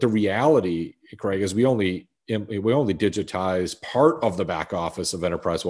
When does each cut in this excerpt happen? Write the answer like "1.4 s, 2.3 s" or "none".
none